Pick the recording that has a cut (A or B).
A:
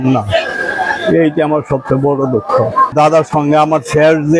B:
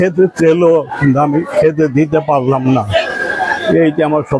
A